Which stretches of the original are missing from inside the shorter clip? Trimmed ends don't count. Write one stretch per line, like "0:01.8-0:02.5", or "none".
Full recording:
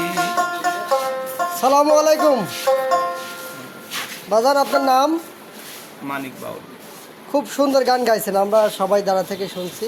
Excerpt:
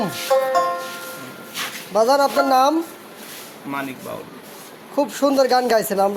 none